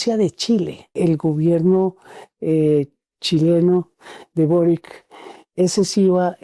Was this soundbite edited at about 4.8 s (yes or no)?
no